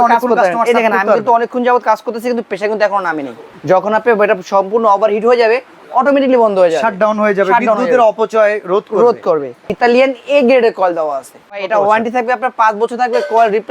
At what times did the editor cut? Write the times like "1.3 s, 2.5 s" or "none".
3.4 s, 9.7 s, 11.6 s